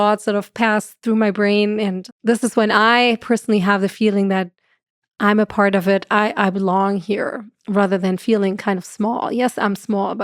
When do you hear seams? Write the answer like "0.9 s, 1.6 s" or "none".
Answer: 2.1 s